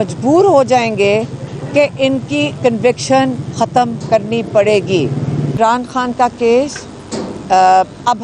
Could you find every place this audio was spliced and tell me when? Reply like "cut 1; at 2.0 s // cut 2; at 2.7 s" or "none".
cut 1; at 5.6 s

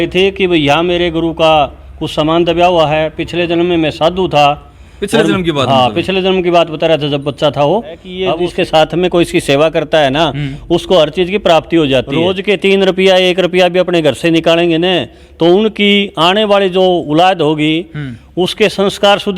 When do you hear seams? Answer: cut 1; at 8.5 s // cut 2; at 12.2 s

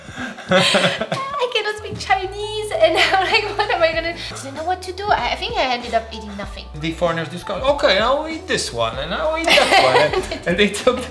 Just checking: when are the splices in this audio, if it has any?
cut 1; at 4.3 s // cut 2; at 6.7 s

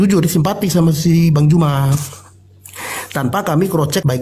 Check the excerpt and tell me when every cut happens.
none

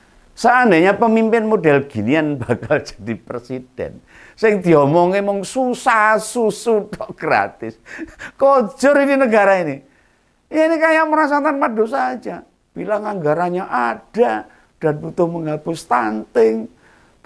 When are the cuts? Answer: none

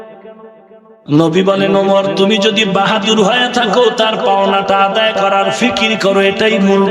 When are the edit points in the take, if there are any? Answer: cut 1; at 0.9 s

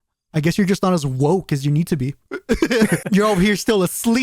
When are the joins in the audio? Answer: cut 1; at 3.0 s

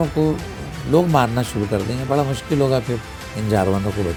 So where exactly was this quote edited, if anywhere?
none

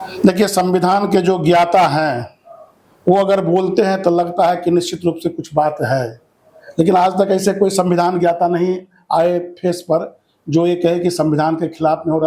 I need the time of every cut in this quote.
none

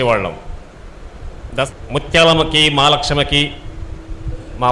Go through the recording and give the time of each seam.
cut 1; at 1.7 s

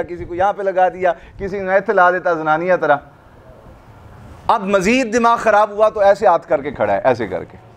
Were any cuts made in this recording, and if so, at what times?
none

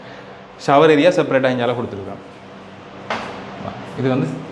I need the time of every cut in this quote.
none

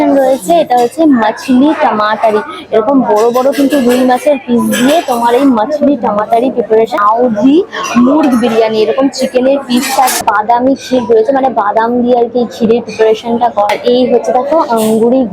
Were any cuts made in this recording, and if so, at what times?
cut 1; at 6.9 s // cut 2; at 10.2 s // cut 3; at 13.7 s

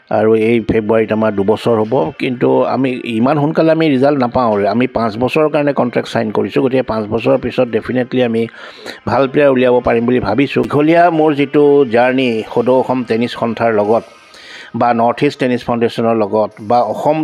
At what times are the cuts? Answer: cut 1; at 10.7 s

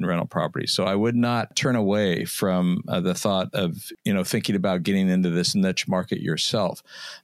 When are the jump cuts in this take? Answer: cut 1; at 1.5 s // cut 2; at 3.9 s

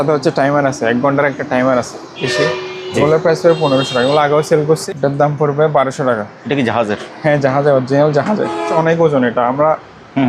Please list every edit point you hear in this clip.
cut 1; at 2.2 s // cut 2; at 4.8 s // cut 3; at 8.7 s

